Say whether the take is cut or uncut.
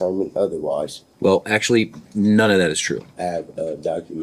cut